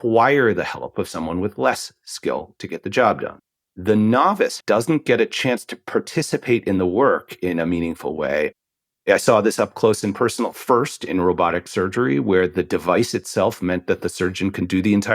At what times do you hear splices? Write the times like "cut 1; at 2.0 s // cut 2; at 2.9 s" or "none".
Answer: cut 1; at 3.3 s // cut 2; at 4.6 s // cut 3; at 8.5 s